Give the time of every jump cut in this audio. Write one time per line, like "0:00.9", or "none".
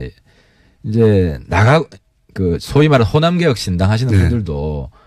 none